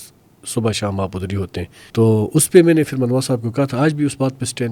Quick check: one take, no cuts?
no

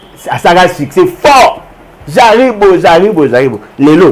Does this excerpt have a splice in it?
no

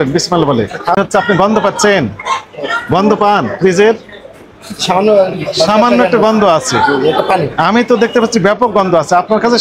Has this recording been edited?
yes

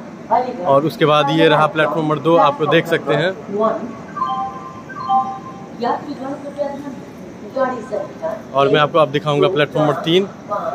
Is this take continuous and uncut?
yes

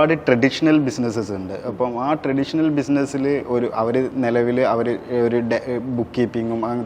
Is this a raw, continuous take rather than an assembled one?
yes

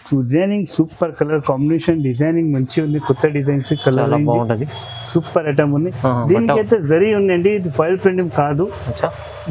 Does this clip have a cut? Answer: no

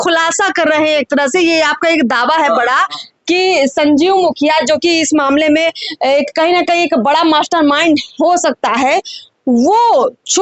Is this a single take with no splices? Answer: yes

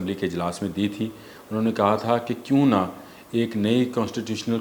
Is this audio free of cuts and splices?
yes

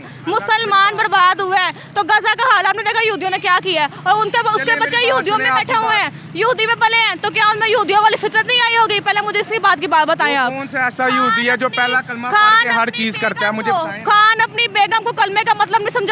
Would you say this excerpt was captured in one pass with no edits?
yes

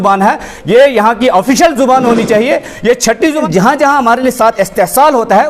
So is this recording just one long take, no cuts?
no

